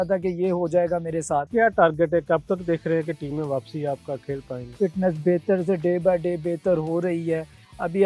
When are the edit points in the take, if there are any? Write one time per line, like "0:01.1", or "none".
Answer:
0:01.5
0:04.6